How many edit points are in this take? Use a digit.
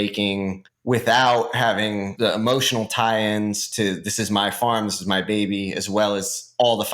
1